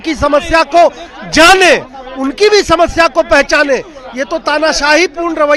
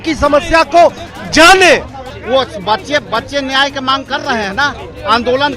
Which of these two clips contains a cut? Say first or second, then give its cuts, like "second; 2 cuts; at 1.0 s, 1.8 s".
second; 1 cut; at 2.1 s